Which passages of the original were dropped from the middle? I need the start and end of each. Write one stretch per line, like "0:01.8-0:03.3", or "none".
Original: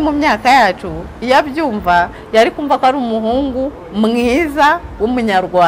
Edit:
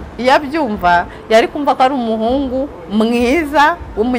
none